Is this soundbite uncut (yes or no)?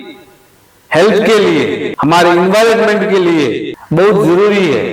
no